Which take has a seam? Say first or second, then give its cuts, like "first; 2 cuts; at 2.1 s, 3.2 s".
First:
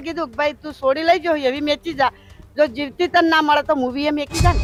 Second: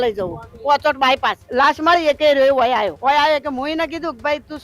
second; 2 cuts; at 1.4 s, 2.9 s